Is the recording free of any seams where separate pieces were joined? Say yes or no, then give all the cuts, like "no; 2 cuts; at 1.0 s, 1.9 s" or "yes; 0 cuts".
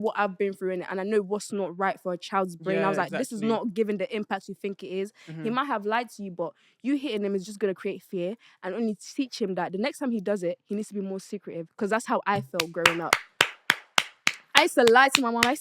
yes; 0 cuts